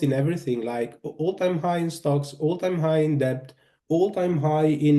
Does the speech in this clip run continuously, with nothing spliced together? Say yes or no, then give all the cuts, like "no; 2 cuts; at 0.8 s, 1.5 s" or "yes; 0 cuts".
yes; 0 cuts